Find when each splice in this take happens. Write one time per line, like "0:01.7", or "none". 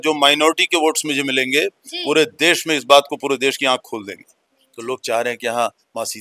0:04.6